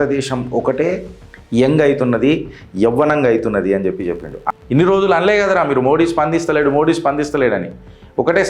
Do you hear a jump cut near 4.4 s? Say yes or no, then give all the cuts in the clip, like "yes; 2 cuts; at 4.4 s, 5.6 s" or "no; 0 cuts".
yes; 1 cut; at 4.4 s